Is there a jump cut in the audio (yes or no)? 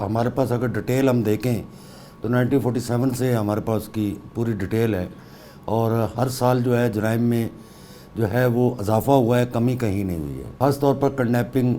yes